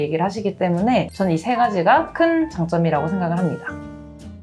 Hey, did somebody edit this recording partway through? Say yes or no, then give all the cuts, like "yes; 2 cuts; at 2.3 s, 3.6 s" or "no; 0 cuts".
no; 0 cuts